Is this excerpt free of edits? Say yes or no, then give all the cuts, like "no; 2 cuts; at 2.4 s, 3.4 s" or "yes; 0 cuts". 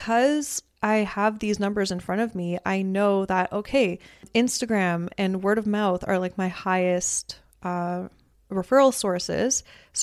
no; 1 cut; at 4.2 s